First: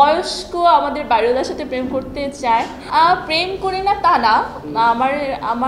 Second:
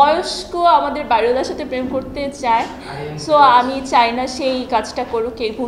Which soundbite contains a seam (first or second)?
first